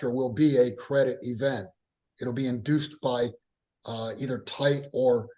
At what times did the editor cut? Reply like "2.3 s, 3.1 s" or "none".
none